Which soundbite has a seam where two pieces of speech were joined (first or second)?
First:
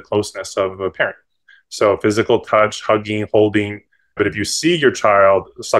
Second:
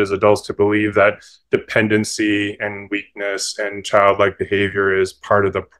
first